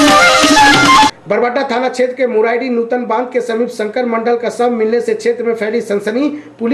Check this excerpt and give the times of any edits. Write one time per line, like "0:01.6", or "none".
0:01.0